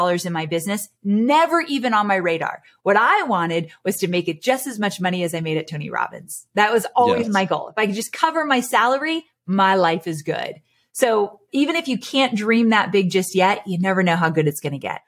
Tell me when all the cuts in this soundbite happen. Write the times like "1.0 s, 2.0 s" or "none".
none